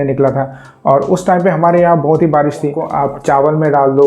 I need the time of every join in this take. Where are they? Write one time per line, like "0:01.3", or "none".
0:02.8